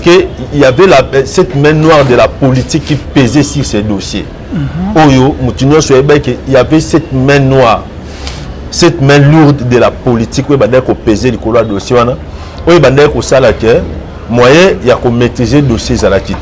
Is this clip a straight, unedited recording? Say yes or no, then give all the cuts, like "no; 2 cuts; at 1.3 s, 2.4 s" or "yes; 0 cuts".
yes; 0 cuts